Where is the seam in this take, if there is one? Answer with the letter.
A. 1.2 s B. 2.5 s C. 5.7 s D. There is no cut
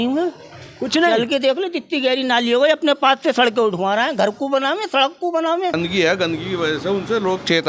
C